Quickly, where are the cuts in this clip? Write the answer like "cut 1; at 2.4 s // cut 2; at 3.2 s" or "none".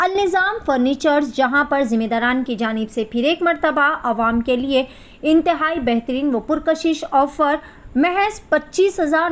none